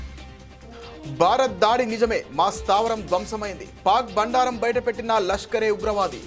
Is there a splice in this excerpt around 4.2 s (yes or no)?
no